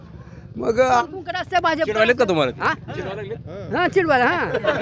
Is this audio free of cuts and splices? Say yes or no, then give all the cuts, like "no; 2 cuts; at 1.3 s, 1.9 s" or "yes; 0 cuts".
no; 1 cut; at 1.0 s